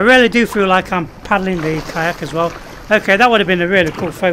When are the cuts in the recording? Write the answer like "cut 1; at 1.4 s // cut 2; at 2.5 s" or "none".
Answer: none